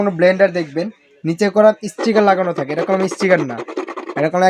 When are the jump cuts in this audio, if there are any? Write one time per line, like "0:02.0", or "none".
none